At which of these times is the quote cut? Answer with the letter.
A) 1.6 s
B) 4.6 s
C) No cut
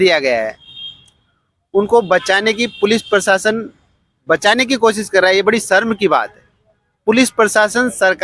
C